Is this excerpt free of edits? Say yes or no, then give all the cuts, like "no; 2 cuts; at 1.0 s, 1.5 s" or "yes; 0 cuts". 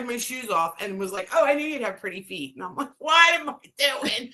yes; 0 cuts